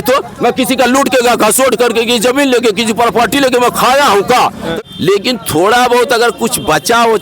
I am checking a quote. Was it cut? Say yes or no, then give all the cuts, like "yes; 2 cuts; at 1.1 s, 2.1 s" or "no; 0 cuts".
yes; 1 cut; at 4.7 s